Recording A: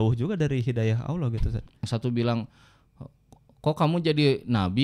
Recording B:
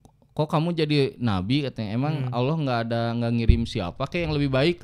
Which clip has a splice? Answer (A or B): A